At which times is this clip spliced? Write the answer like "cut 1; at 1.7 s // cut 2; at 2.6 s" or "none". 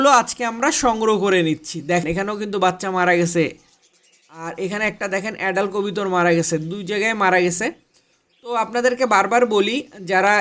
cut 1; at 2.0 s